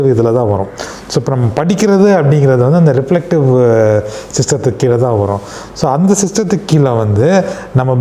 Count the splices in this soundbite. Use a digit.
0